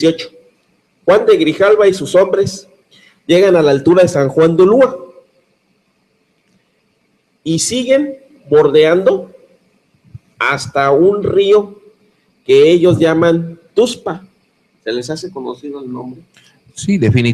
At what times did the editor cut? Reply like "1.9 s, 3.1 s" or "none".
11.3 s